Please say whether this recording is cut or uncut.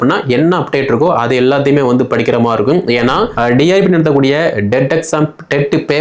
cut